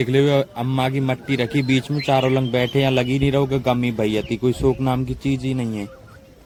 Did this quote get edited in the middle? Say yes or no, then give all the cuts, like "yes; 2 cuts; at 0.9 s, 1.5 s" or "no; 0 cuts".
no; 0 cuts